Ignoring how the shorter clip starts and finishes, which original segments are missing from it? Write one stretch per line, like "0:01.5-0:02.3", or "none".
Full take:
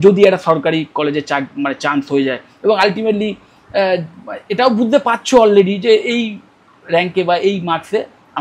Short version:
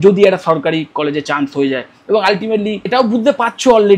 0:01.2-0:01.8
0:03.4-0:04.5

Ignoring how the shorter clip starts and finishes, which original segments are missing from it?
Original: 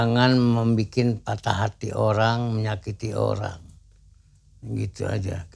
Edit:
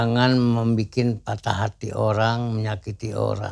none

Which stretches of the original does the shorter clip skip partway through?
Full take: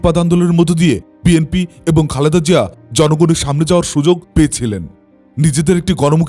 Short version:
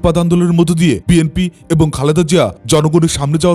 0:01.0-0:01.2
0:02.7-0:02.8

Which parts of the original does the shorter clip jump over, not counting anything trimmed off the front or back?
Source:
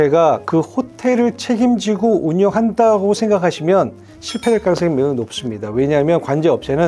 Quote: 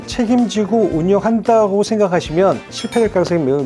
0:04.0-0:04.2

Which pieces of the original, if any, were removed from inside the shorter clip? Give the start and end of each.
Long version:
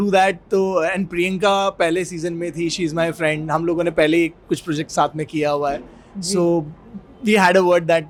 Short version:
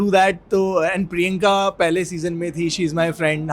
none

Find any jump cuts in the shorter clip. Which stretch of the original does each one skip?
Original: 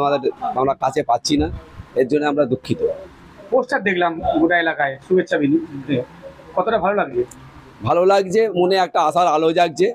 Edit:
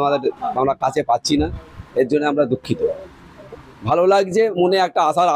0:03.4-0:07.4

